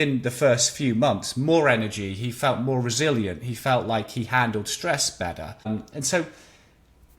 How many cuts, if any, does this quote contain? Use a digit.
1